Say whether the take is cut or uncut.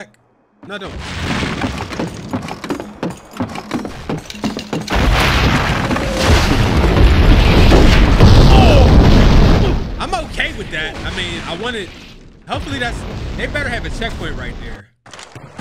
uncut